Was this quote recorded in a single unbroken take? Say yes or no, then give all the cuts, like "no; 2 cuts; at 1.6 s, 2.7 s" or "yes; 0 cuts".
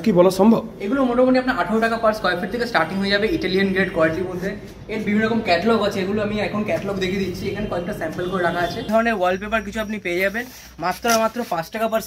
no; 1 cut; at 8.9 s